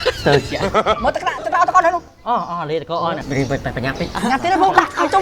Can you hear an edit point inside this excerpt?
yes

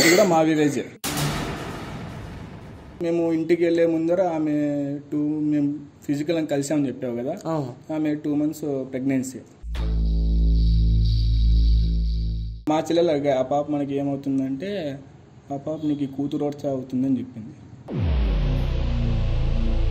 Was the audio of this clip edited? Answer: yes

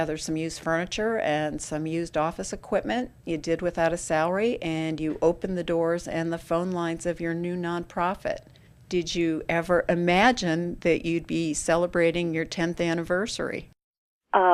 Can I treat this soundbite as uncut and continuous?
yes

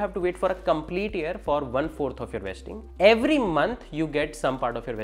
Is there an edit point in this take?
no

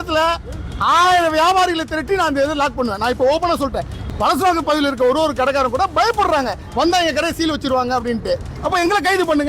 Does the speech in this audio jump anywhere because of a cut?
yes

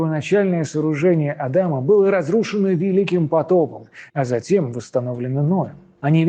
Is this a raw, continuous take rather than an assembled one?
yes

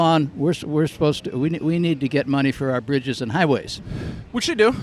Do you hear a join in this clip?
no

